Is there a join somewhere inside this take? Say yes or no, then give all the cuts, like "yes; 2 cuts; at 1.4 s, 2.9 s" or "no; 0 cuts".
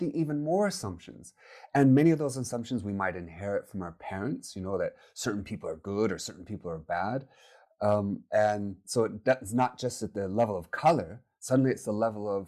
no; 0 cuts